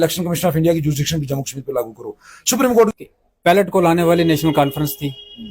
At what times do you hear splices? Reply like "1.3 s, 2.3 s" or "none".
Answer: 2.9 s